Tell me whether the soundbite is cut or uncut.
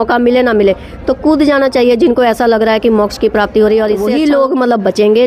cut